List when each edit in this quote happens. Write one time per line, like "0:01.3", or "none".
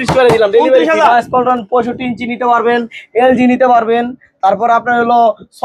0:01.0